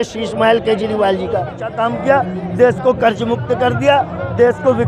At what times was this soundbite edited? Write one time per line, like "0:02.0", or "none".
0:01.6

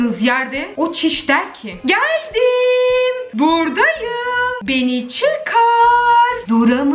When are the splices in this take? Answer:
none

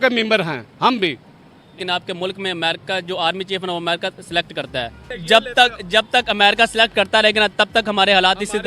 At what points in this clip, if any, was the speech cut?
0:01.7
0:05.1

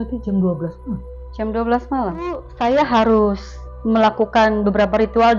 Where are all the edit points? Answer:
0:02.5

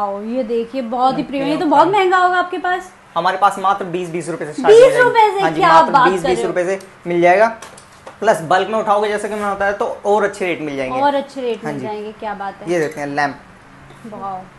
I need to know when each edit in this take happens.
none

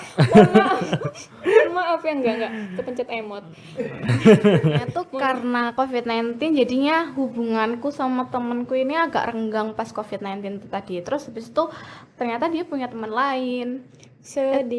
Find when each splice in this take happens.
0:05.0

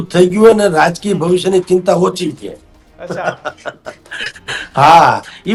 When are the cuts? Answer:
none

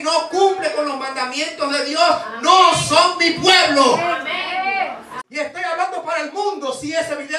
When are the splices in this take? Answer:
0:05.2

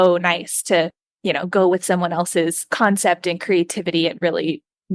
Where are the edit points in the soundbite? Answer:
0:01.0

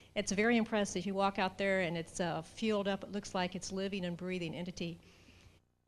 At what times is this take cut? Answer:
0:01.0

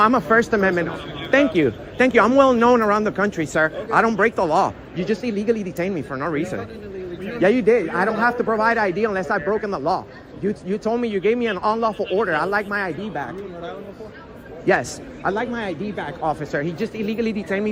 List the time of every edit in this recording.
none

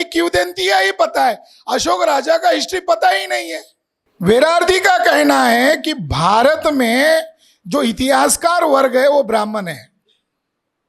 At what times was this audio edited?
0:04.0

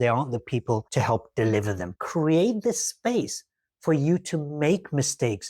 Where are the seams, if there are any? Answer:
0:01.9

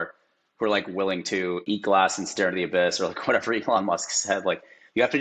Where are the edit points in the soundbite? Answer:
0:01.6

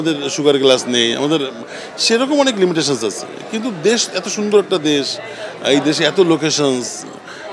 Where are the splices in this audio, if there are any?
none

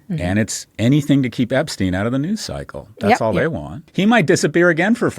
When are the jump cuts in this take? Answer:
0:03.8

